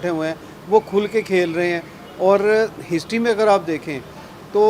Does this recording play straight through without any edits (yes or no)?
yes